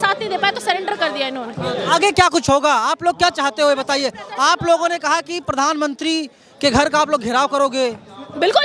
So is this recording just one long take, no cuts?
yes; 0 cuts

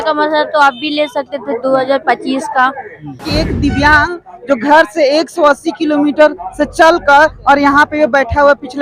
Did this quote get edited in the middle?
yes; 1 cut; at 3.2 s

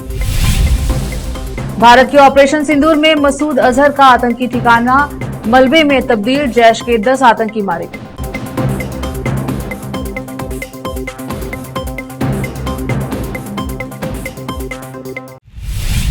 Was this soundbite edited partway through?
yes; 1 cut; at 15.2 s

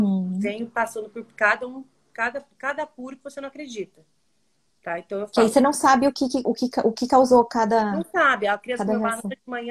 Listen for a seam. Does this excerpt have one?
no; 0 cuts

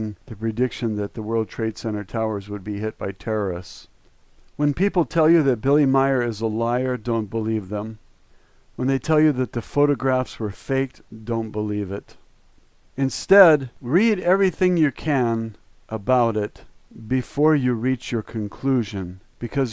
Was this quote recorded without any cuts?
no; 1 cut; at 11.5 s

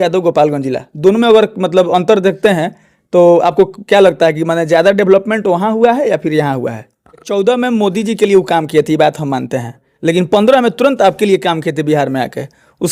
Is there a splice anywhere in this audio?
yes; 1 cut; at 7.3 s

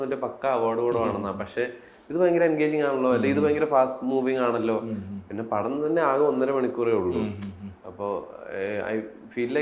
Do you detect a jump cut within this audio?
no; 0 cuts

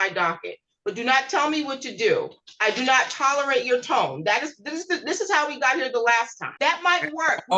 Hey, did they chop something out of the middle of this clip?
no; 0 cuts

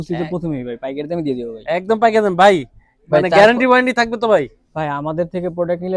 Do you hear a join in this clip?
no; 0 cuts

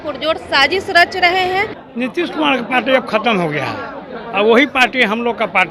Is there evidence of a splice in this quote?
yes; 1 cut; at 1.8 s

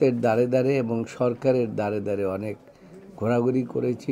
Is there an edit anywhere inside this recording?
no; 0 cuts

